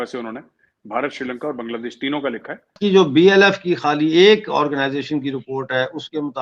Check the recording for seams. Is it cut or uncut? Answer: cut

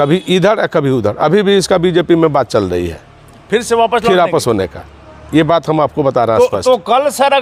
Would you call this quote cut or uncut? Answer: uncut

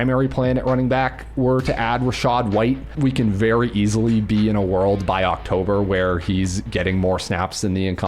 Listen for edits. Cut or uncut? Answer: cut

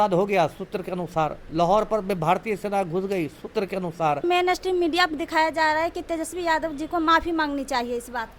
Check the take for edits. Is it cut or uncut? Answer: cut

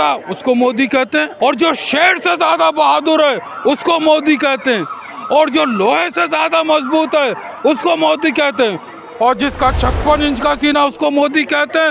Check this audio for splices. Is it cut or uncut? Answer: cut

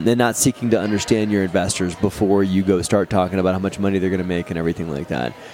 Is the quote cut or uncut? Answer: uncut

